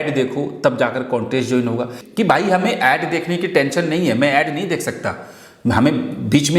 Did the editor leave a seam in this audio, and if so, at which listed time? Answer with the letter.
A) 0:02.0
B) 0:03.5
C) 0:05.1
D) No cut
A